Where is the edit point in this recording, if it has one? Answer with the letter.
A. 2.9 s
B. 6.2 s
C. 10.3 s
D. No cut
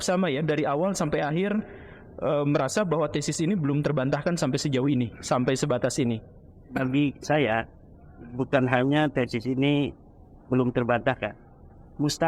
D